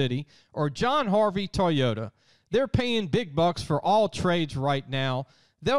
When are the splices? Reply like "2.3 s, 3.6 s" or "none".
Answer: none